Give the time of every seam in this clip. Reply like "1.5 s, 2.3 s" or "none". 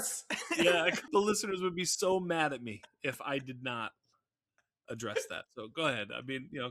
1.1 s